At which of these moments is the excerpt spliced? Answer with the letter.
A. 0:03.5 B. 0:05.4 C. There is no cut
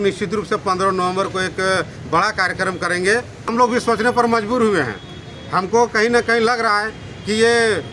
A